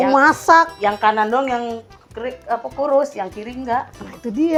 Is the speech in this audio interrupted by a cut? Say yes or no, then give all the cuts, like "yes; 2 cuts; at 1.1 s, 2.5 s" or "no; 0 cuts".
no; 0 cuts